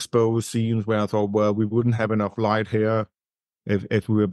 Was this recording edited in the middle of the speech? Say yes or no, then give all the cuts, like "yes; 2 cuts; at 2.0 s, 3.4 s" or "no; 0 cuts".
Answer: no; 0 cuts